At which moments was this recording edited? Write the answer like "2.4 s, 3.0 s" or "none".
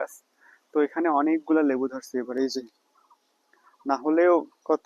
none